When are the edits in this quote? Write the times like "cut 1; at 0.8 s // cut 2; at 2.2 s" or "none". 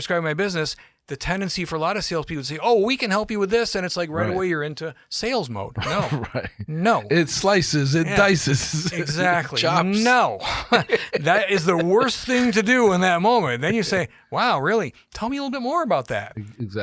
none